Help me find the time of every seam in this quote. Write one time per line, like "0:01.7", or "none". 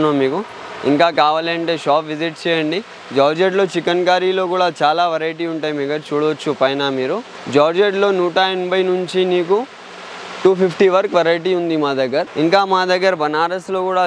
0:07.3
0:12.3